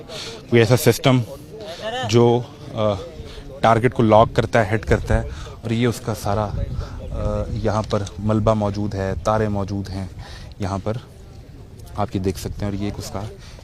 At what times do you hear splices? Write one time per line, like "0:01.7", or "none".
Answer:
none

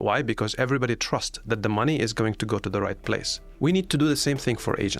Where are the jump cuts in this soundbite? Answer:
0:03.4

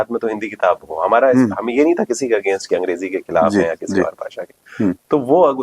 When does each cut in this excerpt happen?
none

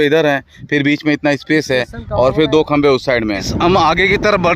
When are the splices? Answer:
0:03.5

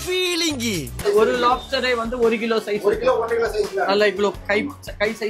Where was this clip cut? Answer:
0:01.0

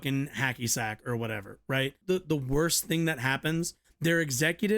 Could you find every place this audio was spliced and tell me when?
0:02.0
0:03.8

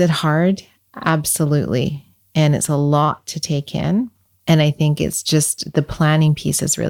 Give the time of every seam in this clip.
0:04.2

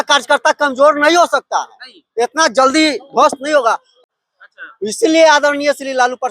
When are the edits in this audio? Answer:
0:03.9

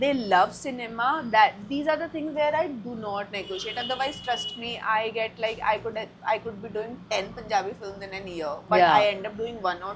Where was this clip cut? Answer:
none

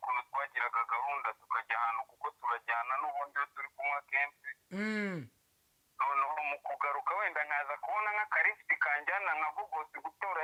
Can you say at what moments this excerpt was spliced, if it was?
none

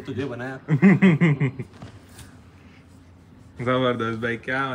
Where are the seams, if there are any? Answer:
none

